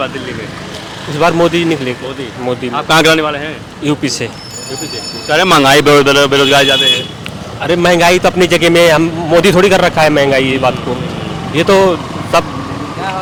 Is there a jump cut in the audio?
no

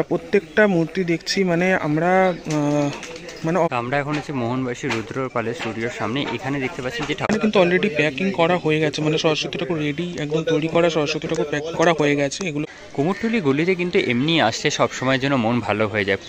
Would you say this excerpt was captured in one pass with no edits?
no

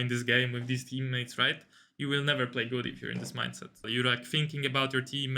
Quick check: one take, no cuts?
no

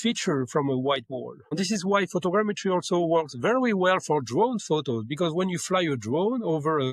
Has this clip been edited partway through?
no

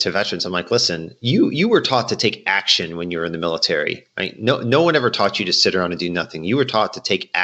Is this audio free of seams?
yes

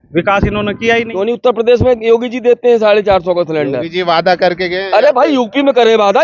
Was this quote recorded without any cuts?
no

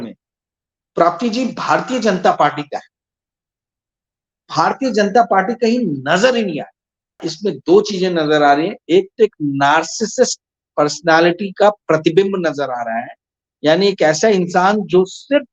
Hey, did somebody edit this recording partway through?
yes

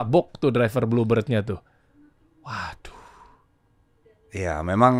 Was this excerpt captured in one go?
yes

